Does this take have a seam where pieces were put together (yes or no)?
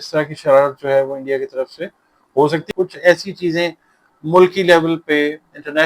yes